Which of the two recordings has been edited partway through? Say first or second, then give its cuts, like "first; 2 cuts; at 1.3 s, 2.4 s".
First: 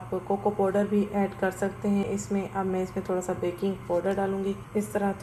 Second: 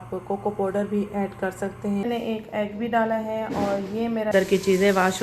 second; 2 cuts; at 2.0 s, 4.3 s